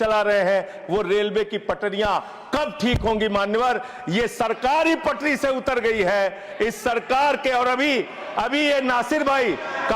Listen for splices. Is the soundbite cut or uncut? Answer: uncut